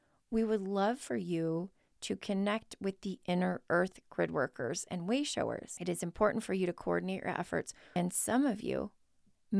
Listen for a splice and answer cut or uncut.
cut